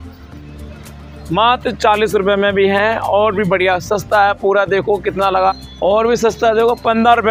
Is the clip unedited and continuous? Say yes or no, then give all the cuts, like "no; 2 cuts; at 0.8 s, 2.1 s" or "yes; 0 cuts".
yes; 0 cuts